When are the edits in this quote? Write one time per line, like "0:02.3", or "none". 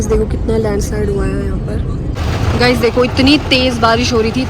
0:02.2